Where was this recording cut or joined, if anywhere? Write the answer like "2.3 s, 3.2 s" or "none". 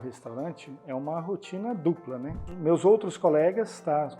2.4 s